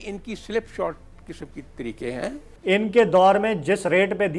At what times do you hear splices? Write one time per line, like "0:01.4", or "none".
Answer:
0:02.5